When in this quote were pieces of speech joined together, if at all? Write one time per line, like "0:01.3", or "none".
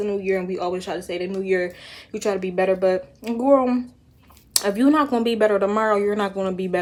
none

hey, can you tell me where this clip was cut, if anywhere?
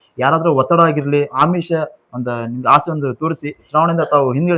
0:01.4
0:03.6

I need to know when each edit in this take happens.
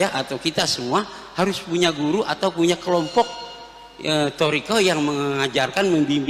none

